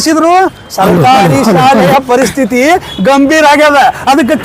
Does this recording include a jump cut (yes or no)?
no